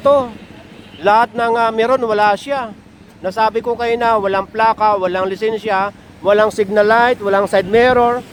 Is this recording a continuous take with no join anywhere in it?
yes; 0 cuts

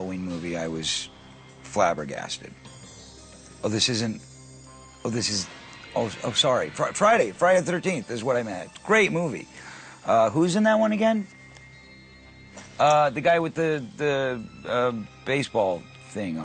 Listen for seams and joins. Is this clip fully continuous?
yes; 0 cuts

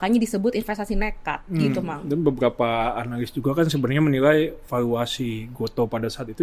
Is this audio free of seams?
yes; 0 cuts

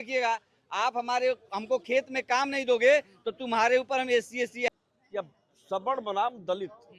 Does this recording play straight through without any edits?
no; 1 cut; at 4.7 s

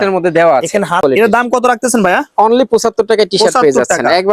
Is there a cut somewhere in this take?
yes; 1 cut; at 1.0 s

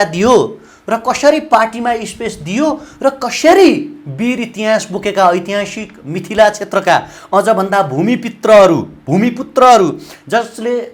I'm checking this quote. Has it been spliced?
no; 0 cuts

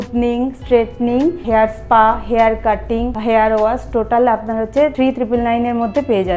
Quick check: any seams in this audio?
yes; 3 cuts; at 1.4 s, 3.1 s, 4.9 s

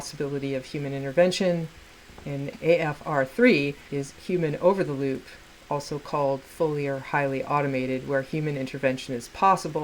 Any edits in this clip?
no; 0 cuts

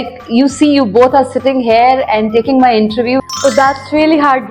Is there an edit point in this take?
yes; 1 cut; at 3.2 s

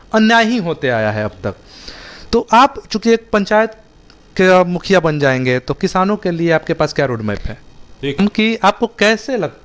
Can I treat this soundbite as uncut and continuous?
no; 1 cut; at 8.2 s

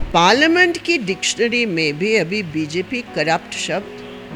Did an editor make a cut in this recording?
no; 0 cuts

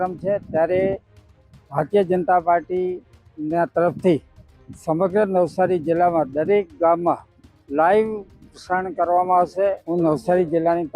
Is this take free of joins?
no; 1 cut; at 9.8 s

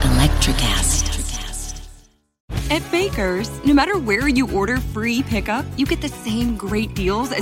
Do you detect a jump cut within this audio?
yes; 1 cut; at 2.5 s

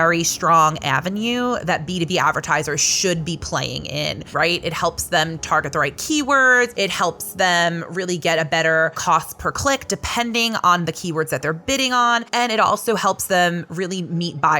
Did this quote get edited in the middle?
yes; 4 cuts; at 4.2 s, 6.7 s, 9.0 s, 12.3 s

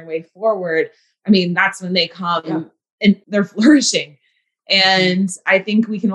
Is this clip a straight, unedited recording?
no; 2 cuts; at 1.1 s, 3.2 s

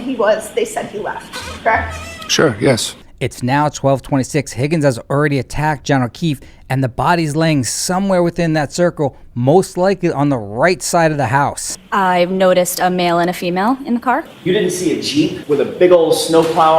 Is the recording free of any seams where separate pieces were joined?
no; 4 cuts; at 3.0 s, 11.7 s, 14.3 s, 15.4 s

